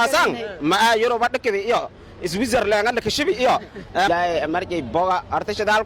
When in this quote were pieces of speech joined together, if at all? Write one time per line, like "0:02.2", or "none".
0:04.1